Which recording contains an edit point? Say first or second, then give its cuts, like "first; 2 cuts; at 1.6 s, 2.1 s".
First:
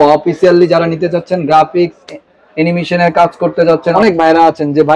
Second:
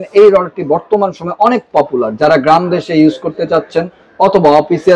first; 1 cut; at 3.8 s